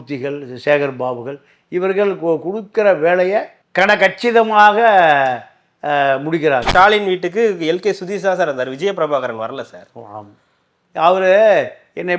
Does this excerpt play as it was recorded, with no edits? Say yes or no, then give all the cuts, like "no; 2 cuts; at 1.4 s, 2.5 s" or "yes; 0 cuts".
no; 1 cut; at 6.7 s